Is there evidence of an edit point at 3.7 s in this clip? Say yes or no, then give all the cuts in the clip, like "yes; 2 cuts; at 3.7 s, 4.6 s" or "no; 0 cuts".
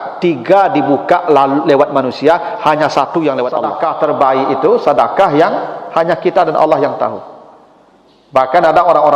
yes; 1 cut; at 3.7 s